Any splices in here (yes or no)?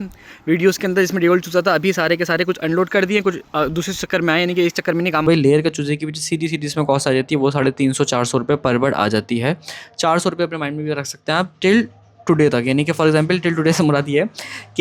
yes